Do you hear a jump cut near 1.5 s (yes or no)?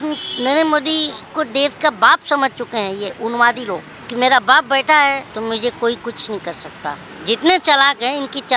no